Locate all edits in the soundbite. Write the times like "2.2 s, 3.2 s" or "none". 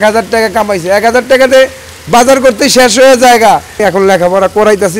3.8 s